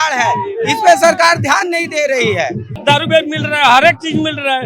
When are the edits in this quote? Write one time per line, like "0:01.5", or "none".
0:02.7